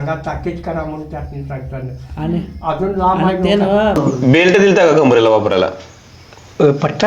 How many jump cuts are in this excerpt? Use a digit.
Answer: 1